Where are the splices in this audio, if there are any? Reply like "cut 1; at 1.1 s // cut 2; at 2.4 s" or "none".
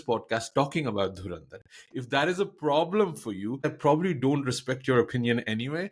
cut 1; at 3.7 s